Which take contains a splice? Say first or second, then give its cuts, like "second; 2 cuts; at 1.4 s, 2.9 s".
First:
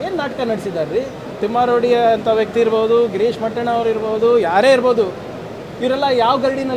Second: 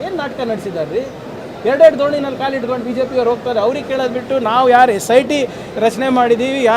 first; 1 cut; at 1.4 s